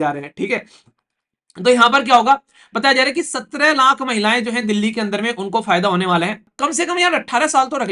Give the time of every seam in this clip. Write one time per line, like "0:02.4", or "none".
0:06.5